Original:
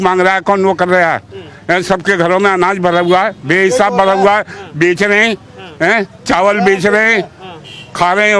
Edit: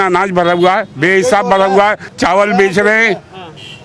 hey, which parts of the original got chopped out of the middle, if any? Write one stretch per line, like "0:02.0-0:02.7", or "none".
0:04.6-0:06.2